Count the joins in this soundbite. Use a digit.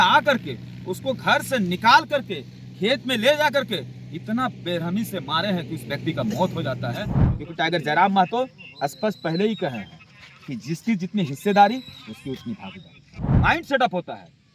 2